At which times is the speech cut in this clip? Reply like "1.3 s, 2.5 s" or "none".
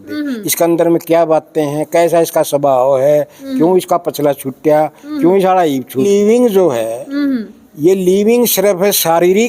6.1 s